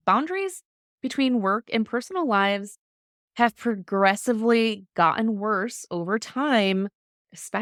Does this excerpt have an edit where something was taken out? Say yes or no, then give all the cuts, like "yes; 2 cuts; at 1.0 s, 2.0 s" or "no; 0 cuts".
no; 0 cuts